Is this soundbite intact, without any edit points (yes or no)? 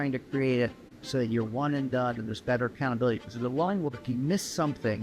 yes